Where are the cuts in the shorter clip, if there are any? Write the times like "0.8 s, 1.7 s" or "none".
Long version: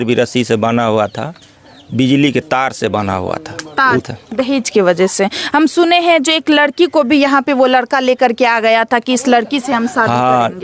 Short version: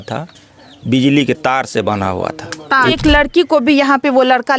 3.0 s